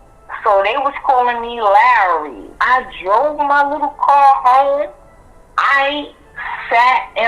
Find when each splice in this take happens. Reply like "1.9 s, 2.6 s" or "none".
2.4 s